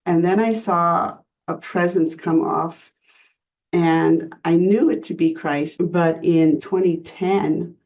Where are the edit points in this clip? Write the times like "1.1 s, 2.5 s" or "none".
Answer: 2.8 s, 5.7 s, 6.6 s